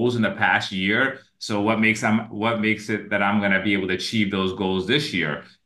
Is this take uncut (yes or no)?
yes